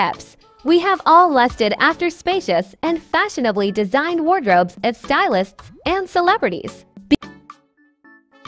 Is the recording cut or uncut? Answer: uncut